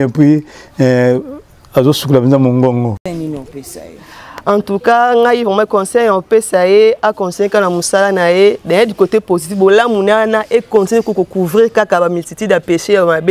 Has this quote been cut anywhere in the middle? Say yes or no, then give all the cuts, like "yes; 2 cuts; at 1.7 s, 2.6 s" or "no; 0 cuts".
yes; 1 cut; at 3.0 s